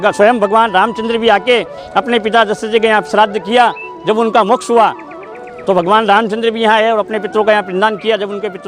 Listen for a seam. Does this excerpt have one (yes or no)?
no